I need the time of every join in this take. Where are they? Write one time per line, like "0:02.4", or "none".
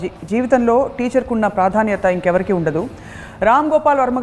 none